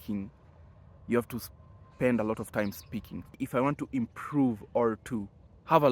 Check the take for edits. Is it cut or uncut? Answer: cut